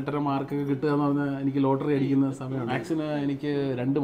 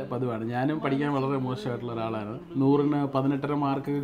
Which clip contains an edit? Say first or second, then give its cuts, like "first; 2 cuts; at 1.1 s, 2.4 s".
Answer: first; 1 cut; at 2.6 s